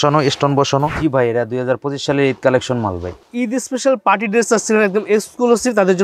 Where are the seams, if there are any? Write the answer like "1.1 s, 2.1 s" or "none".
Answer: 0.9 s, 3.3 s